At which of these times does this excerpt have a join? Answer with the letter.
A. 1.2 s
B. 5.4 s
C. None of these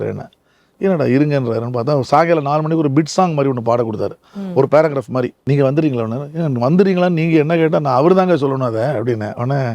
B